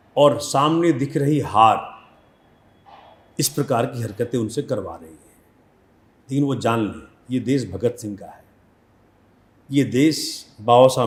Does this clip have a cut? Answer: no; 0 cuts

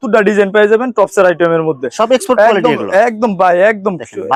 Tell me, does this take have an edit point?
no; 0 cuts

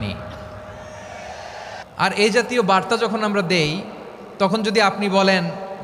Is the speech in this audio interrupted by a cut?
yes; 1 cut; at 1.8 s

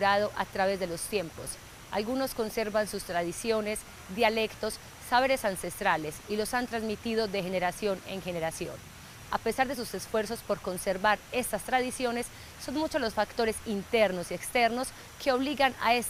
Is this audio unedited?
yes; 0 cuts

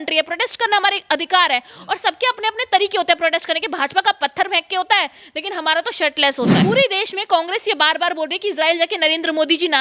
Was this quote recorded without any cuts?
no; 1 cut; at 6.6 s

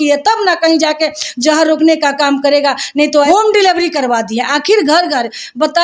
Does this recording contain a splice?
yes; 1 cut; at 3.3 s

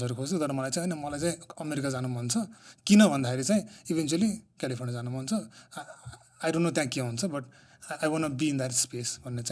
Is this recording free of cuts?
yes; 0 cuts

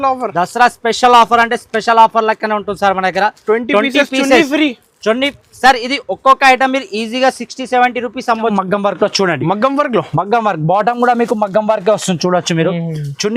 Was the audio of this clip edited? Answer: yes; 1 cut; at 8.5 s

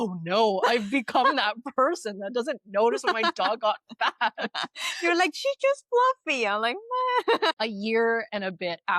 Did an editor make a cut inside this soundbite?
yes; 1 cut; at 7.5 s

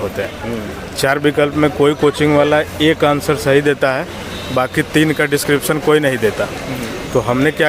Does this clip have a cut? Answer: no; 0 cuts

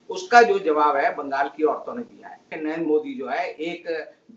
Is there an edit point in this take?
yes; 1 cut; at 2.5 s

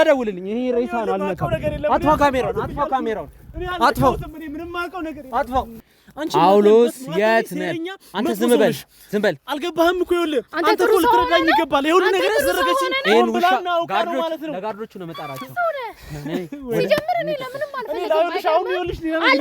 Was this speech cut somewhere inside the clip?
yes; 1 cut; at 5.7 s

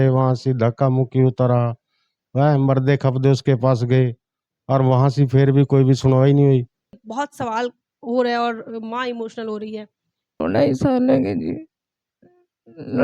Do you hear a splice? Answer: yes; 2 cuts; at 7.0 s, 10.4 s

